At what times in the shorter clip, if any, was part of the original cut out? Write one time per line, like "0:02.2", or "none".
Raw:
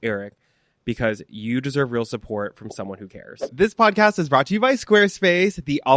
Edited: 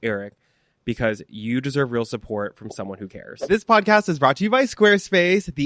0:03.5